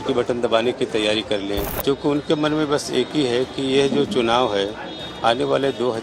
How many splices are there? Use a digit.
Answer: 1